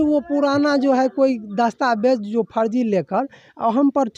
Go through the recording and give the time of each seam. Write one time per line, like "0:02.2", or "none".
none